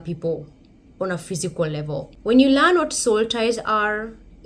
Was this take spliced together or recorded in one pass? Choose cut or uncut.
cut